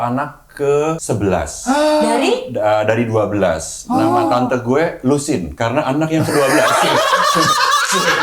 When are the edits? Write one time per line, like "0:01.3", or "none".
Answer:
0:01.0